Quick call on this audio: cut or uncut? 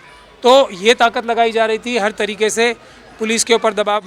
uncut